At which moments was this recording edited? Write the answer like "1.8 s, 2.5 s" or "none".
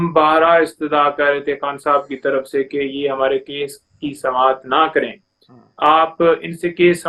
none